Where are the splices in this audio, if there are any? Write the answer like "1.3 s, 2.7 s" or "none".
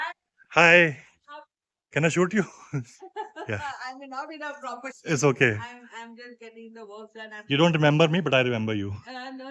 none